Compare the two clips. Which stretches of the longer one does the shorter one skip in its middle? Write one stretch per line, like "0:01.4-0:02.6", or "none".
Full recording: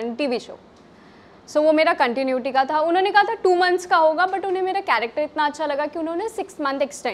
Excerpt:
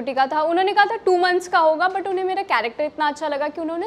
none